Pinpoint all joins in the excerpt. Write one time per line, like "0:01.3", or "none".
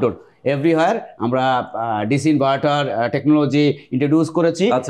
none